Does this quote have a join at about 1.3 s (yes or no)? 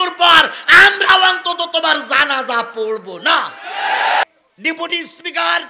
no